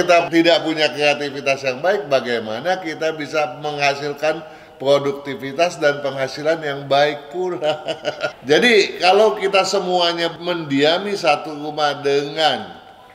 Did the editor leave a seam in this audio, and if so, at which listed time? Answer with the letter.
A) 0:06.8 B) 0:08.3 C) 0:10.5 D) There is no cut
B